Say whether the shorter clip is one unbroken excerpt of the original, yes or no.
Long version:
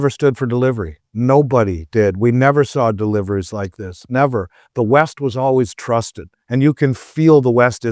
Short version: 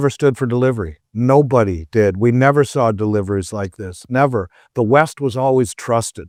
yes